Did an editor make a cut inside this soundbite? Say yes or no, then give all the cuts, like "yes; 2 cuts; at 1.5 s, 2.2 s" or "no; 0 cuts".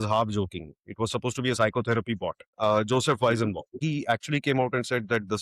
yes; 2 cuts; at 2.4 s, 3.8 s